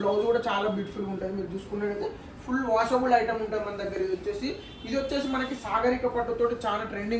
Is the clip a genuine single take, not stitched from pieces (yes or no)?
yes